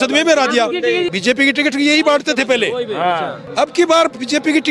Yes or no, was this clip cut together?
yes